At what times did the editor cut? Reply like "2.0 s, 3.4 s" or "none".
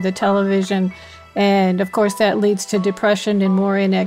none